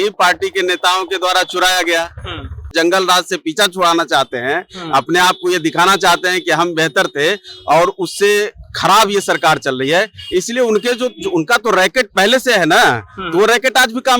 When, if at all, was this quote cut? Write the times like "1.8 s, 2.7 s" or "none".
2.7 s

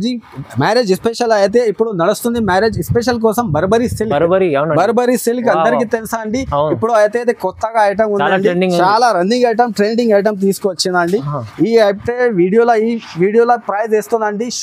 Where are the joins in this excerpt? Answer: none

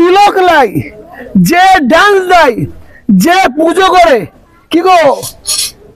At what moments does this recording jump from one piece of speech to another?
none

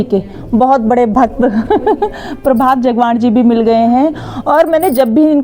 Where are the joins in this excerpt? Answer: none

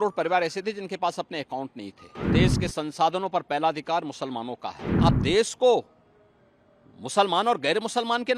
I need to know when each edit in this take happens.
2.3 s, 4.9 s

